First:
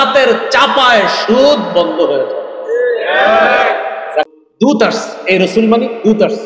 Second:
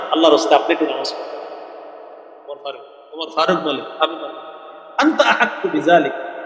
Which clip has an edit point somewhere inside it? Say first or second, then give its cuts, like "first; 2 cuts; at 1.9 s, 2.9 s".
first; 1 cut; at 4.3 s